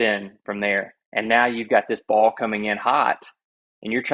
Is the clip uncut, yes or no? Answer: yes